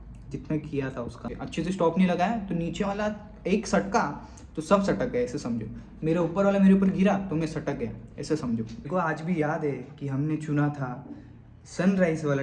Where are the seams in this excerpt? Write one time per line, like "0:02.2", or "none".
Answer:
0:01.4
0:08.8

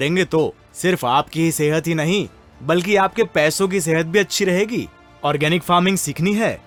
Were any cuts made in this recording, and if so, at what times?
none

